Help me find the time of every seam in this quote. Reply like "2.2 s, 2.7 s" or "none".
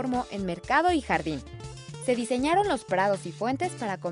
none